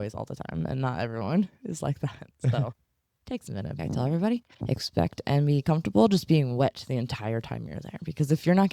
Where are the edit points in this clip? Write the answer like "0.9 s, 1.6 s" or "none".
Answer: 3.8 s